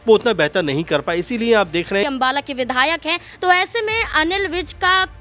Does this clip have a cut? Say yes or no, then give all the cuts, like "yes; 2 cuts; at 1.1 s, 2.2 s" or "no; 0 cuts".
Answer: yes; 1 cut; at 2.0 s